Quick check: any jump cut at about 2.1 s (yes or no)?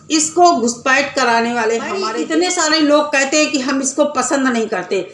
yes